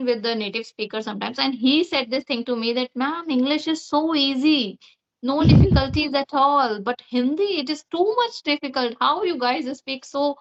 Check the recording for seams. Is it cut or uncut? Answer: uncut